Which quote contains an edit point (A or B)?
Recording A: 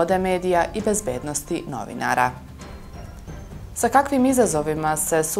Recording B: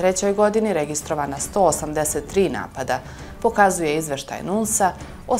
A